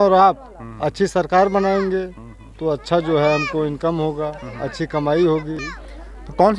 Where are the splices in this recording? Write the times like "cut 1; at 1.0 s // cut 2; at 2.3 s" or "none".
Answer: cut 1; at 5.6 s